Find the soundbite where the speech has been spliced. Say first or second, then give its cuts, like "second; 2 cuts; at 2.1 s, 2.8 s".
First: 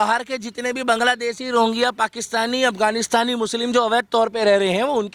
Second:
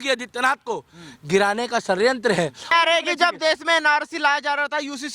second; 1 cut; at 2.7 s